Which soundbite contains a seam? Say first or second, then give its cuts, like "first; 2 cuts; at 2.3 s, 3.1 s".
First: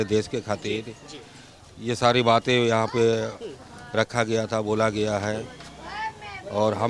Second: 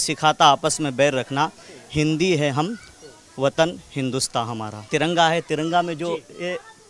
second; 1 cut; at 4.9 s